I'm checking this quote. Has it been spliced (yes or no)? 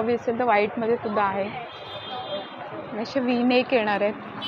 no